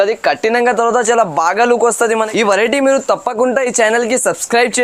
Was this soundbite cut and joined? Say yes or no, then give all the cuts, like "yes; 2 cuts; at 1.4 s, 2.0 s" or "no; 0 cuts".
yes; 1 cut; at 2.1 s